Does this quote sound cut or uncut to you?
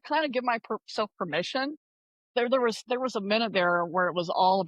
cut